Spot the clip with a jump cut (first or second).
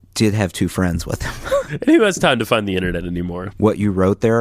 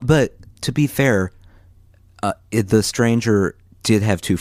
first